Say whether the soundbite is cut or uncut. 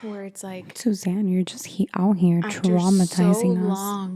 uncut